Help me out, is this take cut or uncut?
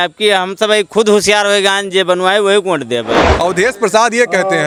uncut